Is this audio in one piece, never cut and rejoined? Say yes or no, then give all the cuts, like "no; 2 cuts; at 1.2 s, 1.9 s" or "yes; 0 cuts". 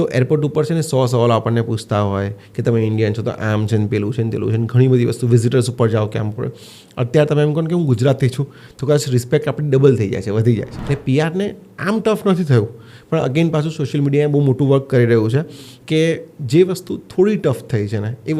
no; 1 cut; at 10.7 s